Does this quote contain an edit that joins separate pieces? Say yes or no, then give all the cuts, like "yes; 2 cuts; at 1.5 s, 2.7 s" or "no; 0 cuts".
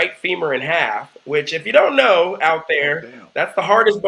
no; 0 cuts